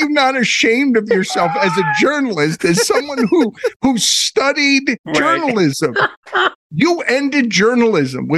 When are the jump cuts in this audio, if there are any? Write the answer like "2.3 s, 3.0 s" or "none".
5.0 s, 6.6 s